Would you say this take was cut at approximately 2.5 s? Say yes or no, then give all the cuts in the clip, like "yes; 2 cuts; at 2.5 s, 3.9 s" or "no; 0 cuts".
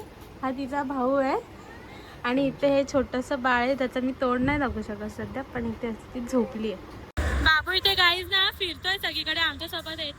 no; 1 cut; at 7.1 s